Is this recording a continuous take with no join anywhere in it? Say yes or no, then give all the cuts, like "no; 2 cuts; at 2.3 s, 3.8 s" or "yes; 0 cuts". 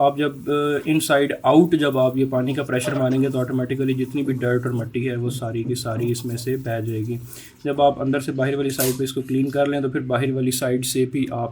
yes; 0 cuts